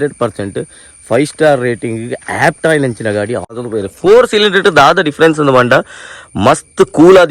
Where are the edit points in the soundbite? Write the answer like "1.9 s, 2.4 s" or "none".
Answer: 3.5 s

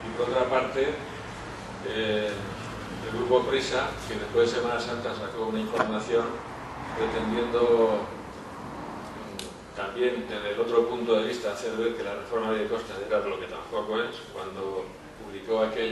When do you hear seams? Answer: none

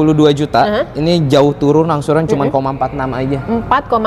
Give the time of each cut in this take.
none

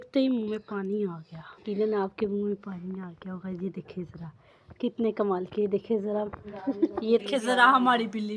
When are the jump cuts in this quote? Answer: 1.7 s, 7.2 s

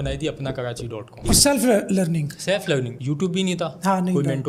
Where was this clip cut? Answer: 1.2 s

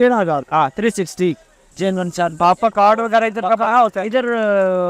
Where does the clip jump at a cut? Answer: 1.6 s

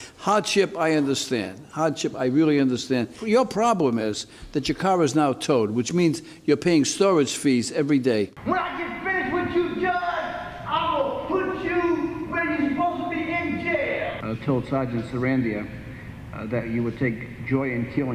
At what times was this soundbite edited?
8.4 s, 14.2 s

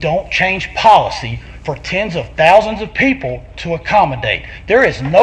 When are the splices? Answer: none

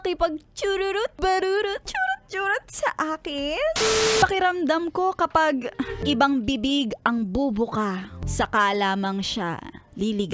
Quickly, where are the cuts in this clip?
1.1 s, 1.9 s, 4.1 s, 6.0 s, 8.2 s

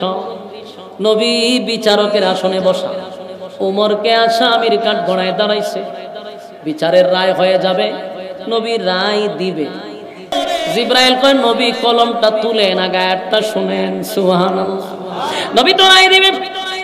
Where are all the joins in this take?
10.3 s

